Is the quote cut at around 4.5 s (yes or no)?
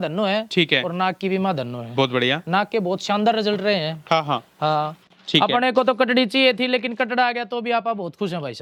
no